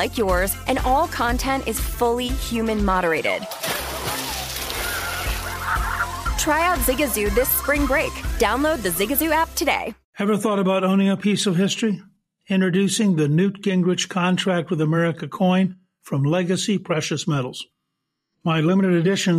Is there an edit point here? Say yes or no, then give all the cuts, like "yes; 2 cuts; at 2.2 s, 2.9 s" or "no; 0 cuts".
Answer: yes; 1 cut; at 10.0 s